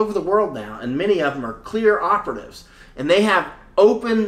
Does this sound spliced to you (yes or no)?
no